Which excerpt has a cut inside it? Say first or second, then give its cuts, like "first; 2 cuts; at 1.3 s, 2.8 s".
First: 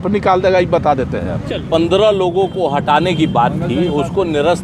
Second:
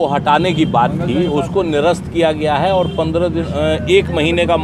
first; 1 cut; at 1.6 s